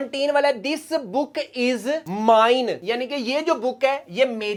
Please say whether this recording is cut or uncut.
uncut